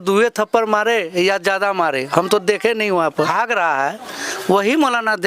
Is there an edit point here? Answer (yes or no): yes